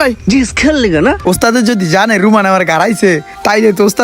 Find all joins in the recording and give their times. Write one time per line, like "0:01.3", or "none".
0:01.2